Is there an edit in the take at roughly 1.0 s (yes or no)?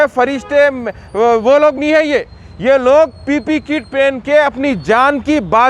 no